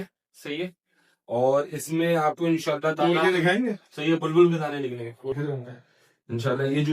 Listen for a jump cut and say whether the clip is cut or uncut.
cut